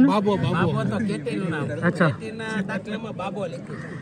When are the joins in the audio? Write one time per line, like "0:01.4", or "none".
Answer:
none